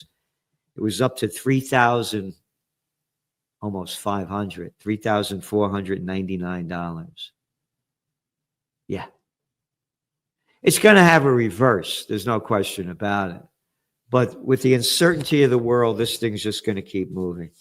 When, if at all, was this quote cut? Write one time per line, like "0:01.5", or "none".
none